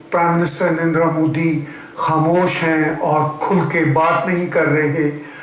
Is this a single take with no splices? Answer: yes; 0 cuts

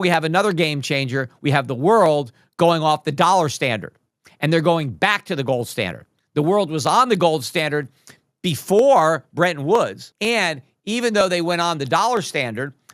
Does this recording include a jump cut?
yes; 1 cut; at 10.1 s

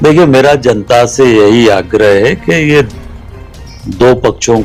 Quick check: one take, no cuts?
yes; 0 cuts

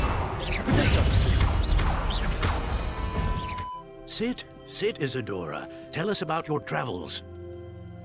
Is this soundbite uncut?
no; 1 cut; at 3.4 s

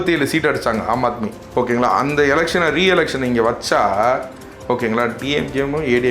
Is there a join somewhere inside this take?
yes; 1 cut; at 1.3 s

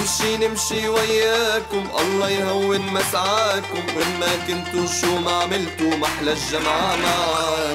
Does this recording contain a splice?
no; 0 cuts

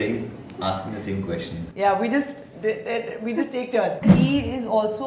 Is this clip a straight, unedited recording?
no; 1 cut; at 4.0 s

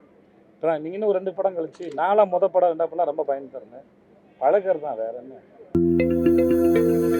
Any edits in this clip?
yes; 1 cut; at 5.8 s

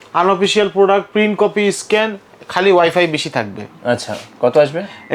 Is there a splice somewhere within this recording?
no; 0 cuts

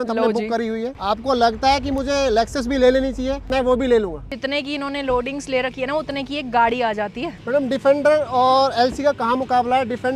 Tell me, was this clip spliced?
yes; 4 cuts; at 0.9 s, 3.5 s, 4.3 s, 7.3 s

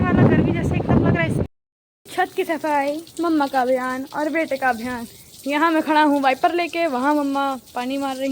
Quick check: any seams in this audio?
yes; 1 cut; at 1.4 s

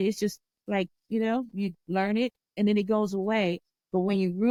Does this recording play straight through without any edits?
yes; 0 cuts

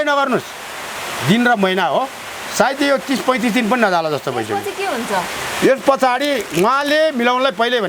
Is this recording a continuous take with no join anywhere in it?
yes; 0 cuts

